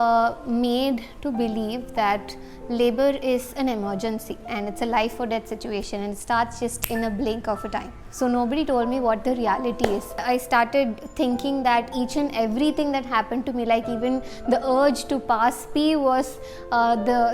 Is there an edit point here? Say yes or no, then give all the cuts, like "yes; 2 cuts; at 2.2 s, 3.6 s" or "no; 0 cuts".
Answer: yes; 3 cuts; at 4.5 s, 8.0 s, 10.2 s